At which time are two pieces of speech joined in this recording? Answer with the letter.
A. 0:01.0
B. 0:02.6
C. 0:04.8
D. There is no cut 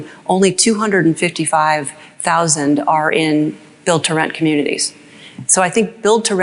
D